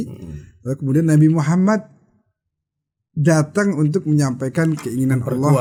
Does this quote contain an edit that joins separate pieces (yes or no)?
no